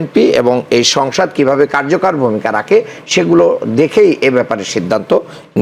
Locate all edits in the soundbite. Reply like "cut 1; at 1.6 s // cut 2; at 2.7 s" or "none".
none